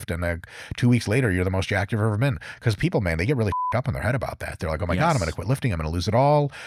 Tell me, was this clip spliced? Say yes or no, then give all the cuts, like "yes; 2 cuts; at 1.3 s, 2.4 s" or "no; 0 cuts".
no; 0 cuts